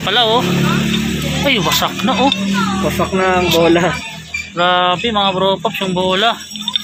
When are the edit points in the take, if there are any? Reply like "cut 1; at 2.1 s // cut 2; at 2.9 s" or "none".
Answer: none